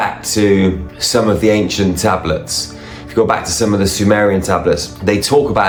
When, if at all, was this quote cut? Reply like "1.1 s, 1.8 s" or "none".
none